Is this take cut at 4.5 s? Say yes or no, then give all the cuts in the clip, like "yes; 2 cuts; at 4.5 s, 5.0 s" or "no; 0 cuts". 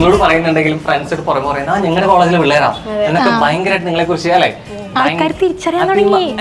no; 0 cuts